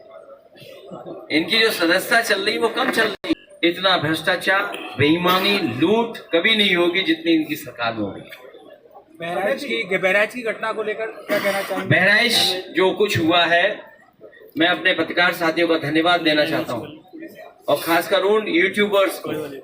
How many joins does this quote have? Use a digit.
1